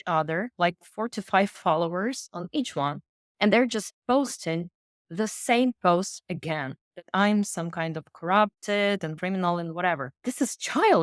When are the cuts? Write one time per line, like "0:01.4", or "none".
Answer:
0:09.1